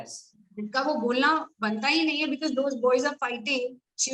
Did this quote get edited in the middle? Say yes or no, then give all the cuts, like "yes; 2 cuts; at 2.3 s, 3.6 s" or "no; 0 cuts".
no; 0 cuts